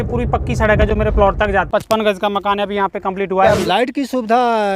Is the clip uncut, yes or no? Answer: no